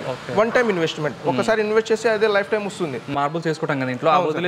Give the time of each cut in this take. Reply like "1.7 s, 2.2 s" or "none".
3.1 s